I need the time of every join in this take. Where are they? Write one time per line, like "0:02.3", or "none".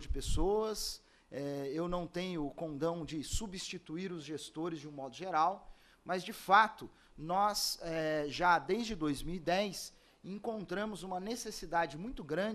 none